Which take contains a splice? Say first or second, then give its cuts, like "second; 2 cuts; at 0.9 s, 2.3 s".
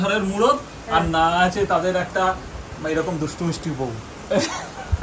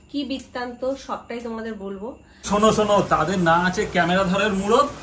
second; 1 cut; at 2.5 s